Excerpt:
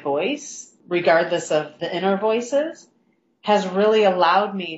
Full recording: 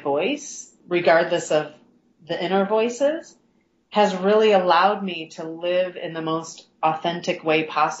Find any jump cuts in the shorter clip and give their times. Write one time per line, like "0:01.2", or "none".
0:01.8